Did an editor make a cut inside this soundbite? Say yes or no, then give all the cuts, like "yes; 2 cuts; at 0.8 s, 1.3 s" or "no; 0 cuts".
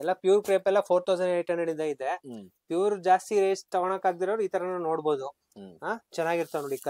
no; 0 cuts